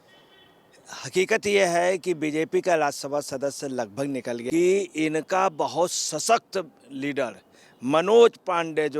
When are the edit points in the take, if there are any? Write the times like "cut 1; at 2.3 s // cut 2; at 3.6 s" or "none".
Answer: cut 1; at 4.4 s